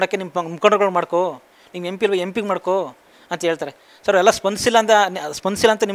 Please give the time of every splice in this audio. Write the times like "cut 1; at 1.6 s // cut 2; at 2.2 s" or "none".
none